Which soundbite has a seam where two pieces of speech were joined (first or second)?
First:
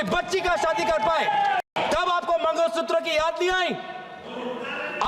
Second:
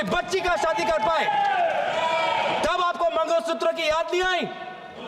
first